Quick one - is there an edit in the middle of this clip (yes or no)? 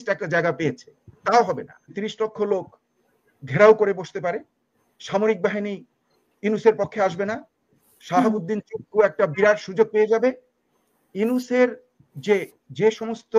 yes